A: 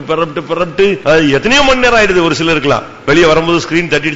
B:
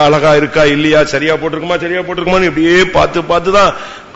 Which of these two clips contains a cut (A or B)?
A